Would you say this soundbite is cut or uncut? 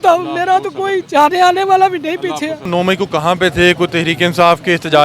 cut